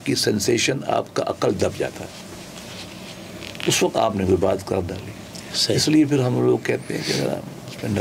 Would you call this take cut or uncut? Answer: uncut